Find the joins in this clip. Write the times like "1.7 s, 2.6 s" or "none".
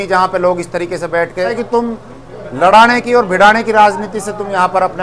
1.6 s